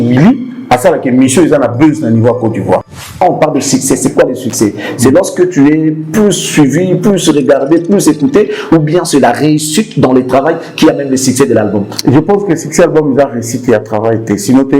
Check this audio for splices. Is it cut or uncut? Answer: cut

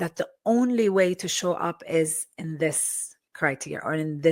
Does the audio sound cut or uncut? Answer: uncut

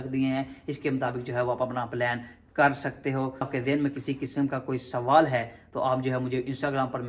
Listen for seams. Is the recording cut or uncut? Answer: cut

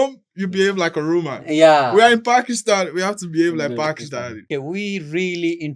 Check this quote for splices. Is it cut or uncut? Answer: cut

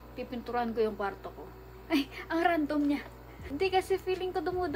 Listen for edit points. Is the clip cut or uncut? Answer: uncut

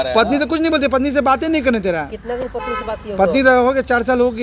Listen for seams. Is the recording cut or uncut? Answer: uncut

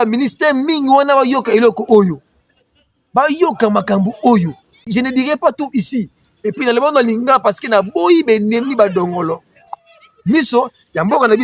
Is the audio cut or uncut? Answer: cut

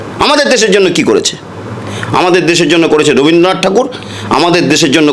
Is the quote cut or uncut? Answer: uncut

